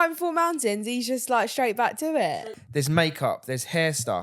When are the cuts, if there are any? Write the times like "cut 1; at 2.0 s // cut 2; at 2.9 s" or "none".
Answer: cut 1; at 2.4 s